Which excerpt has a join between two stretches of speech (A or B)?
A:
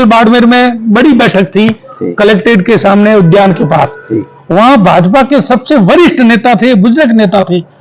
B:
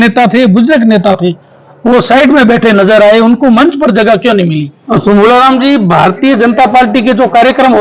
B